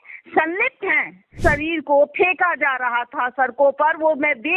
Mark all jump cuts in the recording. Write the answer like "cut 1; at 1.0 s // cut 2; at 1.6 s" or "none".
cut 1; at 1.3 s